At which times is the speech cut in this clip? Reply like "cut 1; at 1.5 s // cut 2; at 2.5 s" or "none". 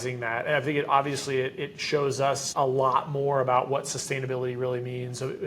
cut 1; at 2.5 s